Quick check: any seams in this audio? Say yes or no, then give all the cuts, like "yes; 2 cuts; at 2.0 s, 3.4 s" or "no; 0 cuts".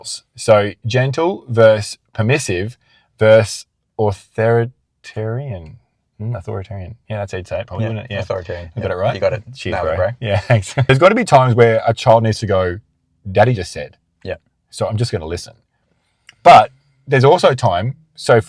yes; 1 cut; at 10.9 s